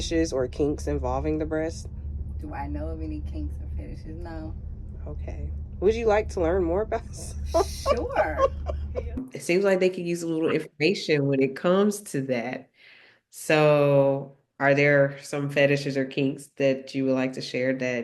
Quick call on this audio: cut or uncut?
cut